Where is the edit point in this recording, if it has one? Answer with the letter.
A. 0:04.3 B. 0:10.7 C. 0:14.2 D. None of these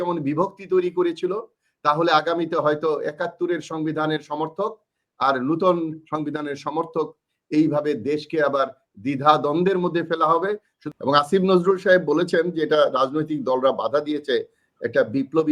B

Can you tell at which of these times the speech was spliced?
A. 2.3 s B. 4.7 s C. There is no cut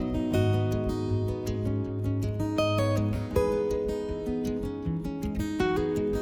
C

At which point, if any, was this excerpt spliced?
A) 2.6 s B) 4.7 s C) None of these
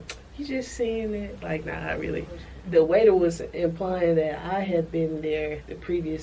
A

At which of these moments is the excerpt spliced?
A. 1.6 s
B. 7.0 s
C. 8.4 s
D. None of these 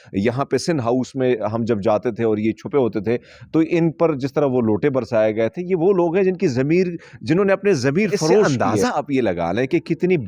C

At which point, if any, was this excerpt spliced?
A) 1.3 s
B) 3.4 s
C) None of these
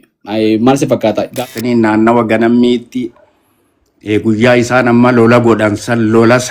A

